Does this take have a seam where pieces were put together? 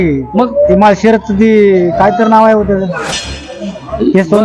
no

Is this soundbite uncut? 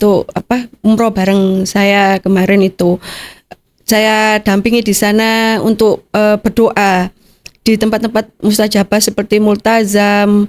yes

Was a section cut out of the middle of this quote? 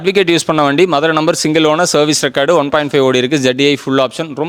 no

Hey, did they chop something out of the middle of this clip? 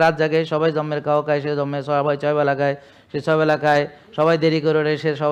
no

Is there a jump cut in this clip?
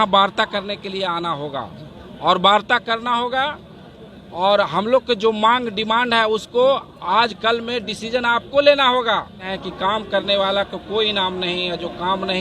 yes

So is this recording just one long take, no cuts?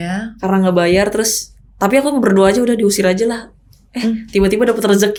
yes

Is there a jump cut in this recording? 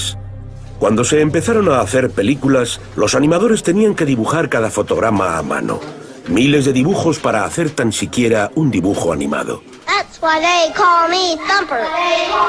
no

